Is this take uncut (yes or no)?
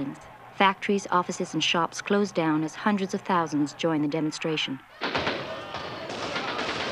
no